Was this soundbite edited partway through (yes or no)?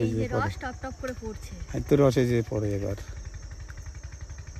no